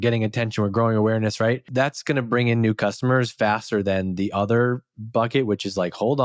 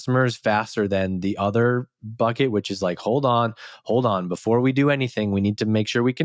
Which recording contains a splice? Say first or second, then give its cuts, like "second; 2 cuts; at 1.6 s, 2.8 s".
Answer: first; 1 cut; at 1.6 s